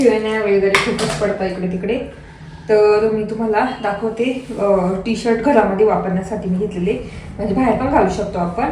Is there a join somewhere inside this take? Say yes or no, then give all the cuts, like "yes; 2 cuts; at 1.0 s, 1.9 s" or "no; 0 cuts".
no; 0 cuts